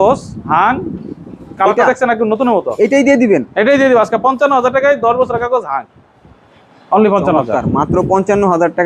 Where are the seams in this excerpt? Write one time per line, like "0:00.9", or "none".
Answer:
none